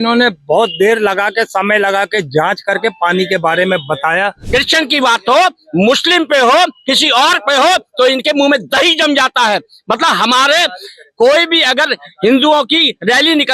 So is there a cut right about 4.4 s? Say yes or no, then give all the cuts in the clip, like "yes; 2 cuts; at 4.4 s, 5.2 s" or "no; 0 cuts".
yes; 1 cut; at 4.4 s